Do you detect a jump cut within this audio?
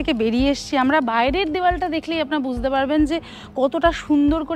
no; 0 cuts

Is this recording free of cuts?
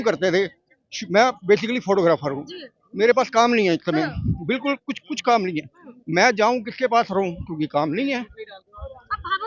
yes; 0 cuts

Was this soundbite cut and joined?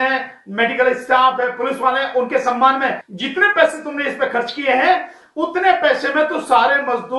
yes; 1 cut; at 3.1 s

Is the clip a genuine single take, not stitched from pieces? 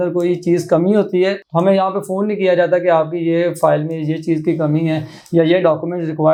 yes; 0 cuts

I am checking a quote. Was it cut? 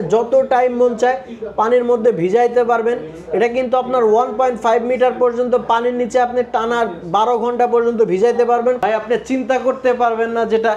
yes; 1 cut; at 8.8 s

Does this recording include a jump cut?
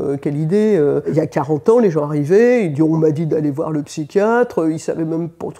yes; 1 cut; at 1.1 s

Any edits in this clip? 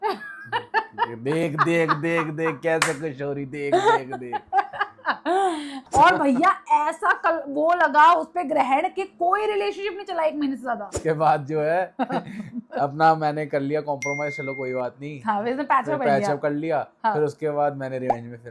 yes; 2 cuts; at 5.8 s, 11.0 s

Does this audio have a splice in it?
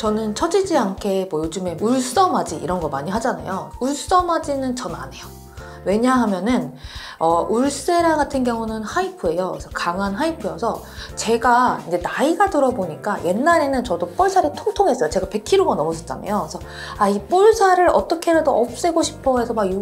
no; 0 cuts

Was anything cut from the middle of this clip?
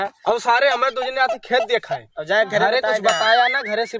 no; 0 cuts

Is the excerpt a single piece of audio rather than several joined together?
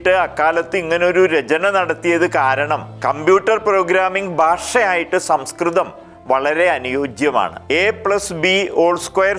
no; 2 cuts; at 2.9 s, 7.6 s

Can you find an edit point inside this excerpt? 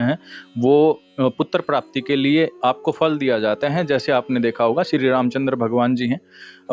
no; 0 cuts

